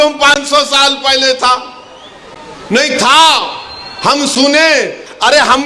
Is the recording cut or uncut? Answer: uncut